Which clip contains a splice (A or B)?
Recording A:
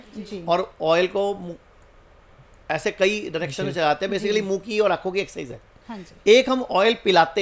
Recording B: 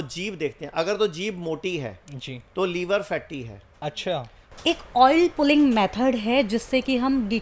B